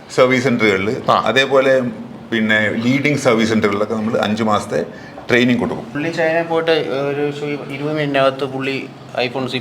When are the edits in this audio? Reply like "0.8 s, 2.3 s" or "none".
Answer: 5.9 s